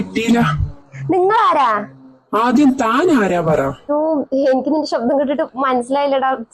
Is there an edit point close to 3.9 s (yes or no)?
yes